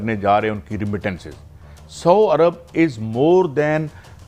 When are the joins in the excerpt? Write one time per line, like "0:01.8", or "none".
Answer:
none

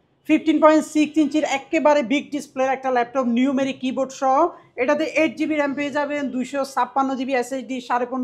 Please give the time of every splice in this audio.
none

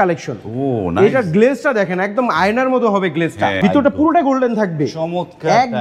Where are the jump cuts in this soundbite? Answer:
0:03.6

